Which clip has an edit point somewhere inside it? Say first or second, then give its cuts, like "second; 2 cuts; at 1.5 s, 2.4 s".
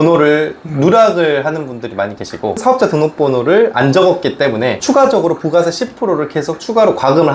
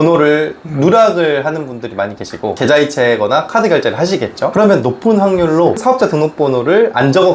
first; 1 cut; at 2.6 s